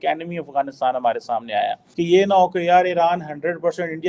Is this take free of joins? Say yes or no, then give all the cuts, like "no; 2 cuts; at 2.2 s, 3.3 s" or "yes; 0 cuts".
no; 1 cut; at 1.8 s